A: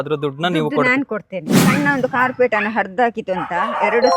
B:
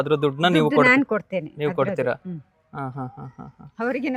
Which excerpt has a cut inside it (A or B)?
A